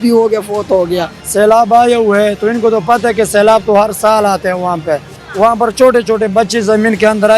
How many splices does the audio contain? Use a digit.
2